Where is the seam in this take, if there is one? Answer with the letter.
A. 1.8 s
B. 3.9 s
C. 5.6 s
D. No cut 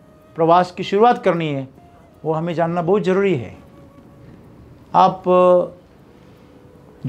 D